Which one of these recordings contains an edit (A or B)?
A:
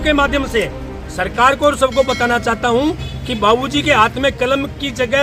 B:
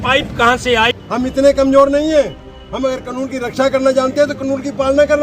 B